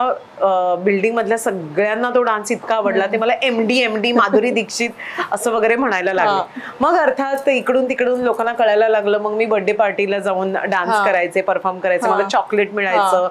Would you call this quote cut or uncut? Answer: uncut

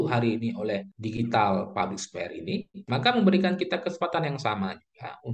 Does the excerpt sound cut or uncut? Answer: cut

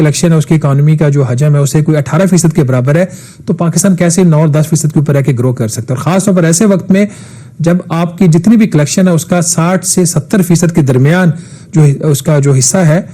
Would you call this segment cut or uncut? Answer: uncut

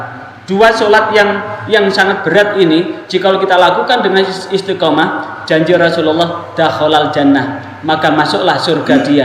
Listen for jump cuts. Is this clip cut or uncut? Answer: uncut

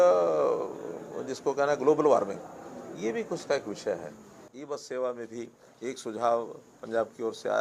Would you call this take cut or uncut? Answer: cut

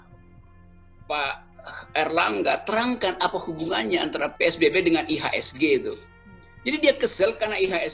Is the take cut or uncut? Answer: cut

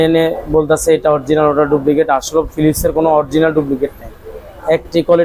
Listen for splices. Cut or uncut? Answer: uncut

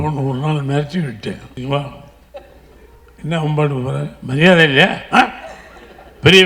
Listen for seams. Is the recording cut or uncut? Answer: cut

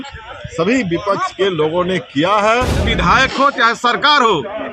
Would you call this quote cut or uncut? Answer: cut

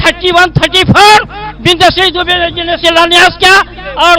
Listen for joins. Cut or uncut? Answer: uncut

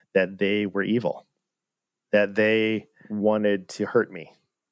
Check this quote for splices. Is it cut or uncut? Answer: cut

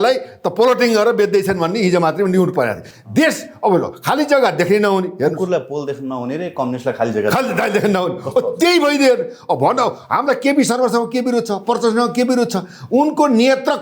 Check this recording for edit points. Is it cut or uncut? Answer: uncut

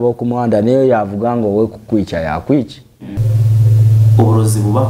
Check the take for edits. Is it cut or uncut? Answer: cut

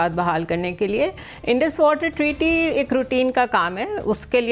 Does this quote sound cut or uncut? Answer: uncut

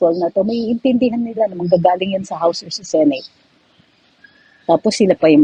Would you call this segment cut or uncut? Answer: uncut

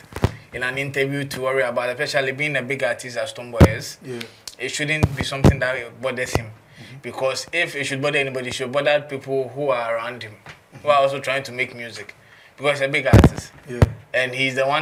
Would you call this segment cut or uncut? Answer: uncut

